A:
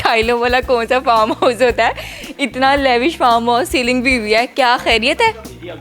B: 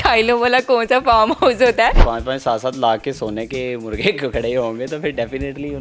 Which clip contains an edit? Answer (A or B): B